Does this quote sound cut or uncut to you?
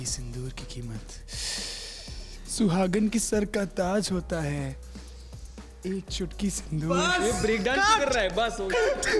uncut